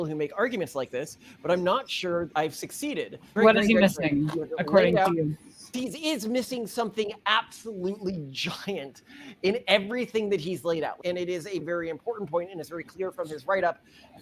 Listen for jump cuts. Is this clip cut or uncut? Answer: cut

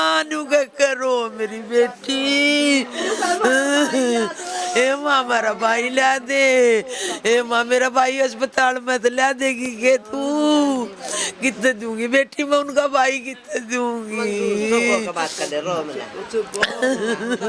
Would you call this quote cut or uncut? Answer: uncut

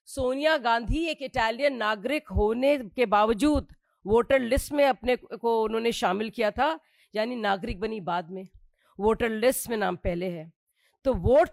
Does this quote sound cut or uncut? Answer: uncut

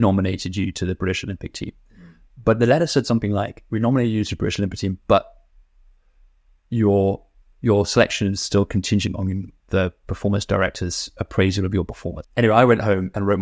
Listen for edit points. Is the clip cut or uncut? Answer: cut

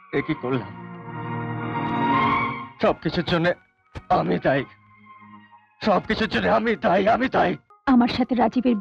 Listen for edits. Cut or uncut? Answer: cut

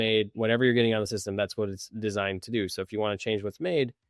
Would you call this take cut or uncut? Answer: uncut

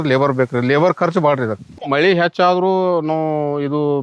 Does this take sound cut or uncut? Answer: cut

